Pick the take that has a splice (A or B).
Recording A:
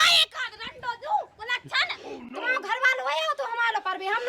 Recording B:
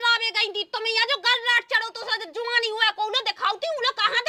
A